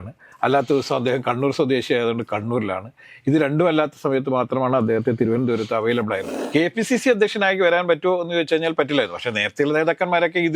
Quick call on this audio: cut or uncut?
cut